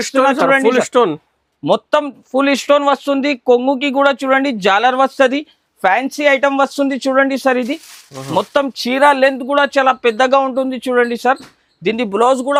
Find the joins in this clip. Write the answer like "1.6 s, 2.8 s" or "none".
none